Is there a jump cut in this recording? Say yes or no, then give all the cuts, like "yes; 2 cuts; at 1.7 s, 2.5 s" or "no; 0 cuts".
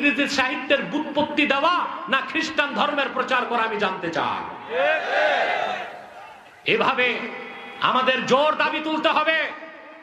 no; 0 cuts